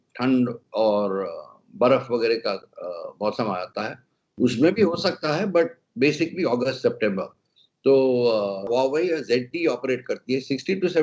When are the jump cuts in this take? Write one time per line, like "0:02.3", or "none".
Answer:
0:08.7